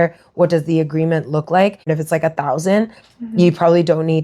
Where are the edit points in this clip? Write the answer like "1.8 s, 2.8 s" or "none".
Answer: 1.9 s